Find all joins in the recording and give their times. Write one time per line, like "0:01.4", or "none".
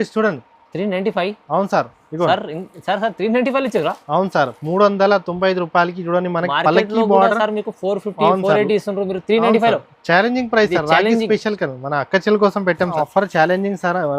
0:12.9